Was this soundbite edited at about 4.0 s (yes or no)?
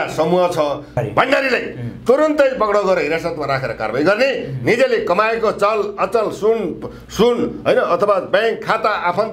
no